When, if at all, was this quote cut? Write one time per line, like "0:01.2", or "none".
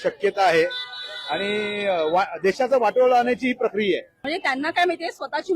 0:04.2